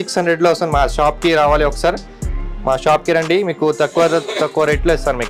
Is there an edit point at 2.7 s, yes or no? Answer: no